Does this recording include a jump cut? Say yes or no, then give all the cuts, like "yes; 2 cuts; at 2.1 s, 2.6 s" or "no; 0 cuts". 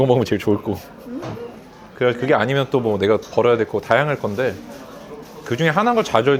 no; 0 cuts